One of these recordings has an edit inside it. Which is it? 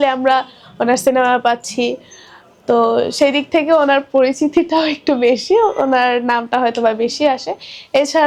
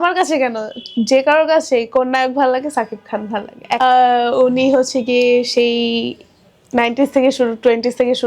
second; 1 cut; at 3.8 s

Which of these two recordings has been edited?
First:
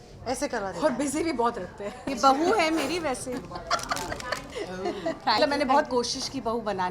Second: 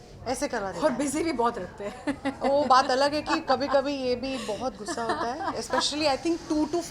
first; 3 cuts; at 2.0 s, 4.5 s, 5.4 s

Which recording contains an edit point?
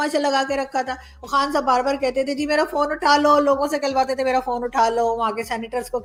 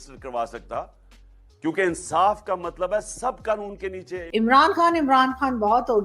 second; 1 cut; at 4.3 s

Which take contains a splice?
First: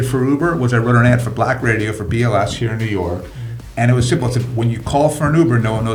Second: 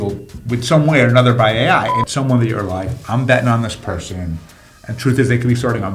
second; 1 cut; at 2.0 s

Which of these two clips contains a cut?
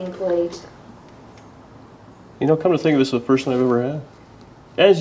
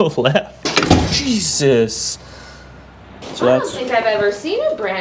second; 1 cut; at 3.3 s

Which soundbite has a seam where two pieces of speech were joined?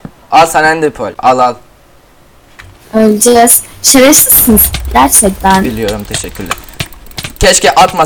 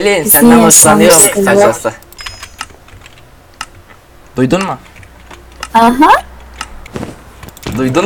first; 1 cut; at 1.1 s

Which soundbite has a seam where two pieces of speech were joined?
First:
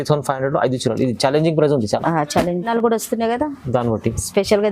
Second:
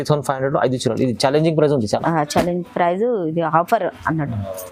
first; 1 cut; at 2.7 s

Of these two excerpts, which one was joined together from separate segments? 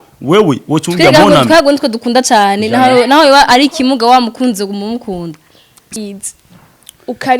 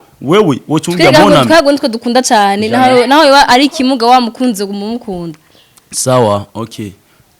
first; 1 cut; at 6.0 s

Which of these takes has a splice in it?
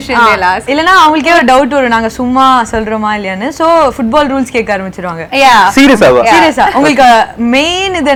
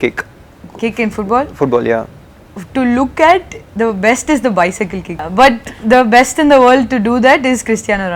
second; 1 cut; at 5.2 s

